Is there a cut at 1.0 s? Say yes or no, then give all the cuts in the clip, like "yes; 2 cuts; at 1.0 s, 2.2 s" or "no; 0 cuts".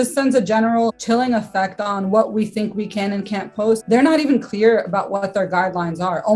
yes; 2 cuts; at 1.0 s, 3.8 s